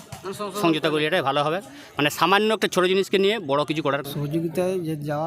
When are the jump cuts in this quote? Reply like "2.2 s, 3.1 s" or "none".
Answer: 4.0 s

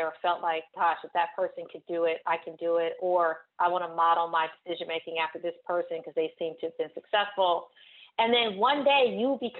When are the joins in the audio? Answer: none

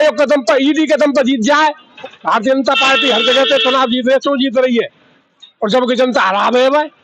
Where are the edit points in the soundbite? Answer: 1.9 s

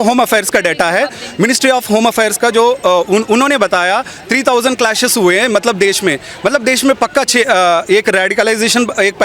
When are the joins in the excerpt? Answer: none

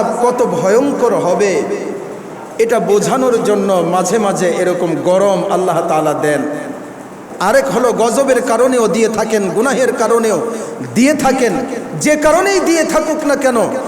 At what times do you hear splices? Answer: 7.2 s

